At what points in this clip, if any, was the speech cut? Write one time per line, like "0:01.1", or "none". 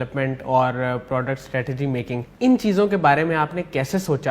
0:02.3